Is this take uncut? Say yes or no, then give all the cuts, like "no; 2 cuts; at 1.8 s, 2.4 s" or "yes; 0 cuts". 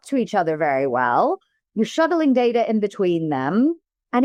yes; 0 cuts